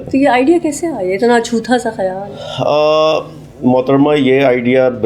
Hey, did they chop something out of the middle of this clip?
no; 0 cuts

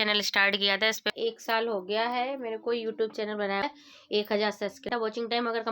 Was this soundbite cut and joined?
yes; 3 cuts; at 1.1 s, 3.6 s, 4.8 s

